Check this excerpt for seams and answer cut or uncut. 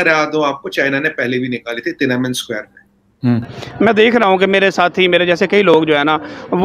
cut